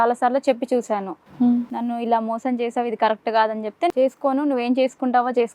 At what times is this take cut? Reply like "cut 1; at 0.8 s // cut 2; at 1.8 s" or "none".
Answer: cut 1; at 3.9 s